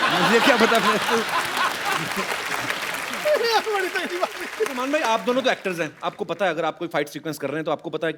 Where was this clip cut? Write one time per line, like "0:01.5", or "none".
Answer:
0:04.8